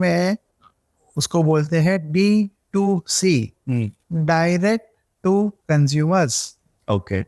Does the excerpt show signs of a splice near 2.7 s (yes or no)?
no